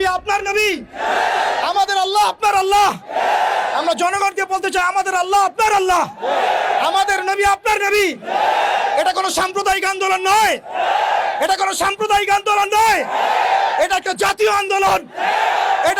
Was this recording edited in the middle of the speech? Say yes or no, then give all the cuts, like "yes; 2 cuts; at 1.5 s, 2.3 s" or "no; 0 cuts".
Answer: no; 0 cuts